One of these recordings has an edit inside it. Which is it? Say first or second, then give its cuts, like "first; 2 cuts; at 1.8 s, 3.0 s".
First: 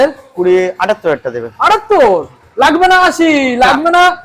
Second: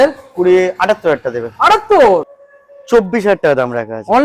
second; 1 cut; at 2.4 s